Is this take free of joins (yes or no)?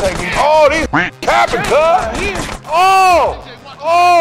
yes